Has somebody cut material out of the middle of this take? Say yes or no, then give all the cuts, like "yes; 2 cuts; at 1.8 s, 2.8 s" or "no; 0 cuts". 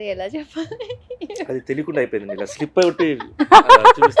no; 0 cuts